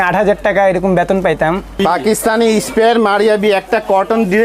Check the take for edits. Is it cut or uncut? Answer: cut